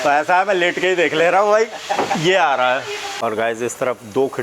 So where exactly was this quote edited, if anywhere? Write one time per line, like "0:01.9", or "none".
0:03.1

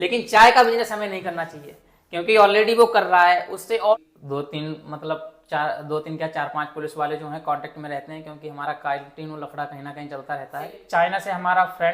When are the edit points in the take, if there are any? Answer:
0:03.9
0:10.8

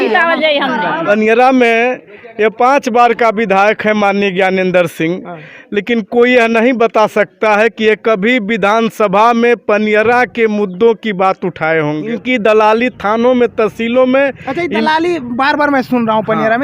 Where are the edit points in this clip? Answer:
0:01.0
0:12.1

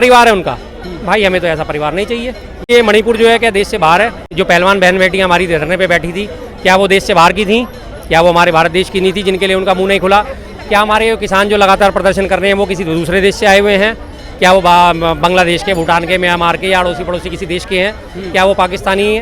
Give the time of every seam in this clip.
0:02.7
0:04.3

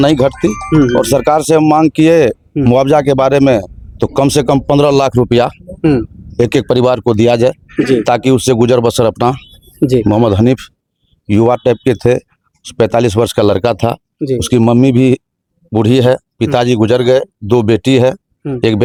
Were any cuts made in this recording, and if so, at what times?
none

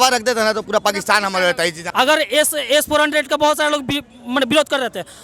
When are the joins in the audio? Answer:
0:01.8

